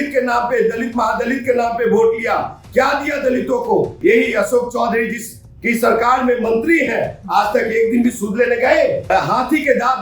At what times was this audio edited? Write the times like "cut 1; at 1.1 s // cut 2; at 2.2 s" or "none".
cut 1; at 3.9 s // cut 2; at 9.1 s